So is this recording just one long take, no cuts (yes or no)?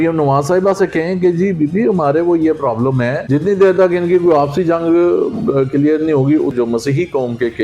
no